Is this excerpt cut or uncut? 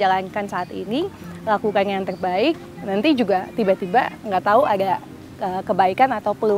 uncut